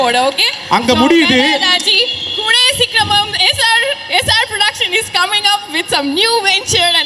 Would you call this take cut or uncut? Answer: uncut